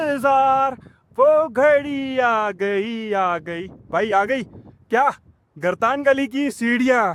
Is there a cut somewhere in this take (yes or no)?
no